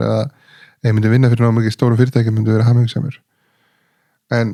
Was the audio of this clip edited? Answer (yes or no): no